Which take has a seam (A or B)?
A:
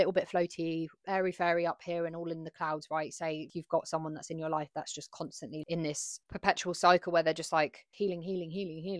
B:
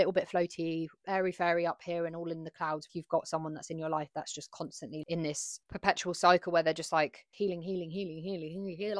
B